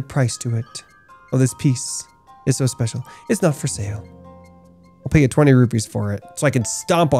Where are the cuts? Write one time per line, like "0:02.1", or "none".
none